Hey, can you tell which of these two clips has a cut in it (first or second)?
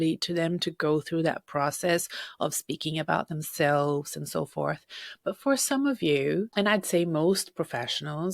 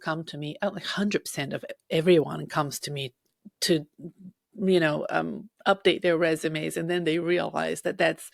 first